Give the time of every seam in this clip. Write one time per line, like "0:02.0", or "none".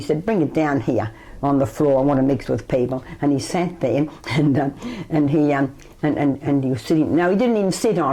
none